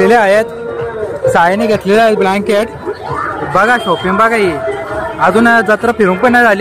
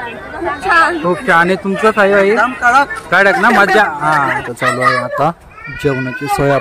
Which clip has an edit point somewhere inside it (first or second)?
second